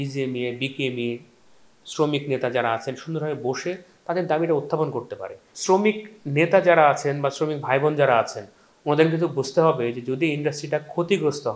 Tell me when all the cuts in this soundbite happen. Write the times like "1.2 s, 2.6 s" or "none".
5.5 s